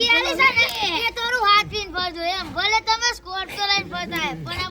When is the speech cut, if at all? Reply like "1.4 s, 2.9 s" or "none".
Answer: none